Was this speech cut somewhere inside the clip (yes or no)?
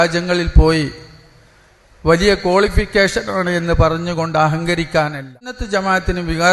yes